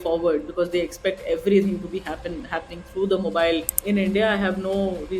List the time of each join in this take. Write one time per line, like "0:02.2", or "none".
0:03.7